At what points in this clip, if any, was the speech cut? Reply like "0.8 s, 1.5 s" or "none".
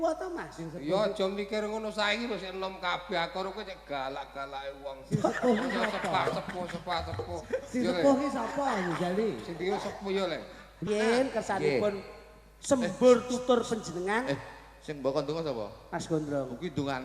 10.7 s